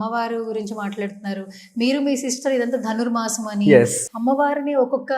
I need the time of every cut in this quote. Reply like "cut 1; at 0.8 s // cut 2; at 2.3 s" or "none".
cut 1; at 4.0 s

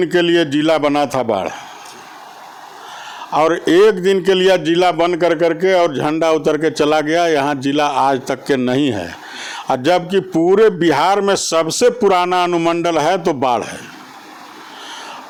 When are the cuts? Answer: none

